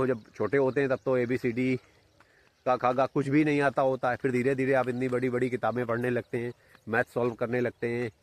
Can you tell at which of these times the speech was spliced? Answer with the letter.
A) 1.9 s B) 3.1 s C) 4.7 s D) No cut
D